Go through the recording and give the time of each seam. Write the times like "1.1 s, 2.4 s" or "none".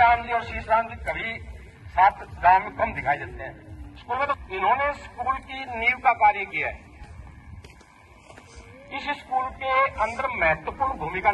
4.4 s